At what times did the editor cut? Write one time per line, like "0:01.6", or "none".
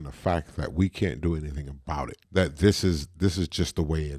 0:02.2